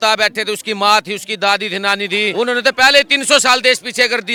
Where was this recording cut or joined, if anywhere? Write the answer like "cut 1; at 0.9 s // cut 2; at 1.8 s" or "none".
none